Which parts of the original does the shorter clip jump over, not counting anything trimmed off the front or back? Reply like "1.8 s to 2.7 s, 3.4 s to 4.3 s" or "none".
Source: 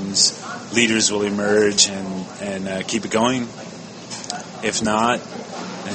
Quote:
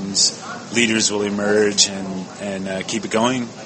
none